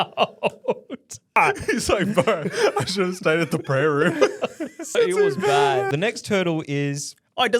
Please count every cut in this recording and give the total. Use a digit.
3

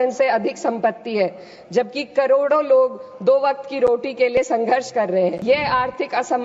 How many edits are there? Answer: 1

